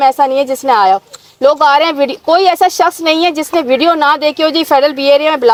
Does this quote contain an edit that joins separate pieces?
no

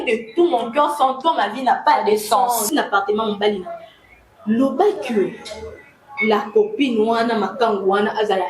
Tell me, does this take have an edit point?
yes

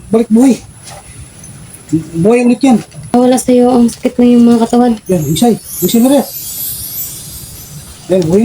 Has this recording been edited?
yes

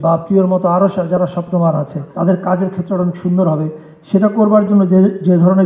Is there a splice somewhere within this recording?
yes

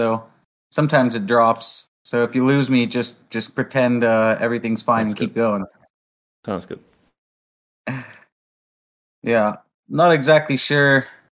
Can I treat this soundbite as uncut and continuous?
yes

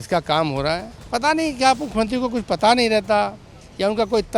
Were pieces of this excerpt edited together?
yes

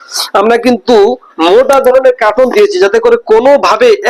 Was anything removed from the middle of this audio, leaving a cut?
no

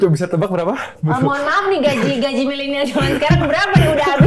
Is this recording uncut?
no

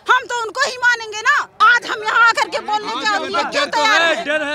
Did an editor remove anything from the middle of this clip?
yes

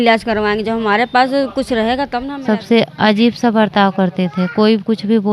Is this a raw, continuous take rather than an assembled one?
no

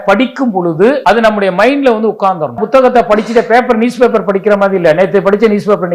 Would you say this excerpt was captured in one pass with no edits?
no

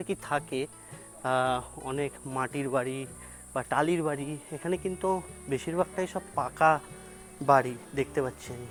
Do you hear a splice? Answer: no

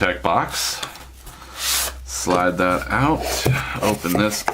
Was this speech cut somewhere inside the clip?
yes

